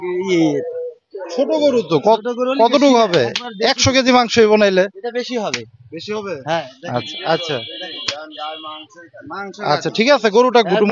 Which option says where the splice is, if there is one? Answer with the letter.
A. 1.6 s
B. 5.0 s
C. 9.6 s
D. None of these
D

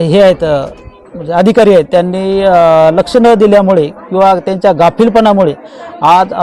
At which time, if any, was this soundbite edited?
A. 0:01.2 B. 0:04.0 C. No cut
C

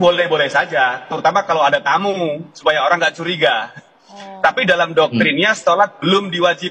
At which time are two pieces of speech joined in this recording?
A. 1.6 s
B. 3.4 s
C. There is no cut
C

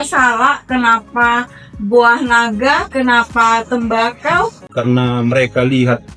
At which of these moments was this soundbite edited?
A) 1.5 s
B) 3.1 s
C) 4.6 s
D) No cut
C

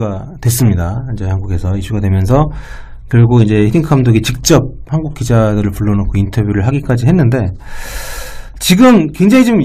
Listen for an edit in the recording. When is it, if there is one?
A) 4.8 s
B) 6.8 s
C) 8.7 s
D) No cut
D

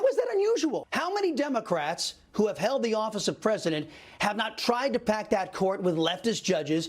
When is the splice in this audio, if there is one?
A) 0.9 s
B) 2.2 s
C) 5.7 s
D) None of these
A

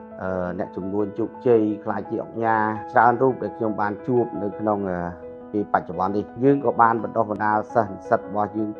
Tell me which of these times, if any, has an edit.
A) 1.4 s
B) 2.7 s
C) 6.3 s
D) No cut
C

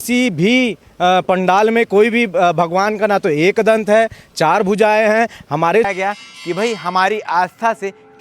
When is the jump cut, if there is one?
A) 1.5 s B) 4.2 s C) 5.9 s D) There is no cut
C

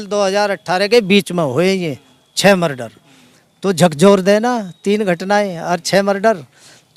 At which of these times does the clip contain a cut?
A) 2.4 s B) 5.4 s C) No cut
C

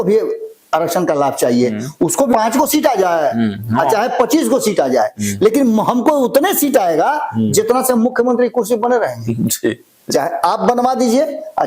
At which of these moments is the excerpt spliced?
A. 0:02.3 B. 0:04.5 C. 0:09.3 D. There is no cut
A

